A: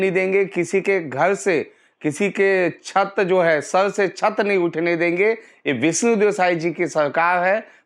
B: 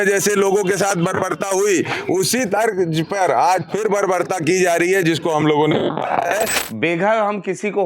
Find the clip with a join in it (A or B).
B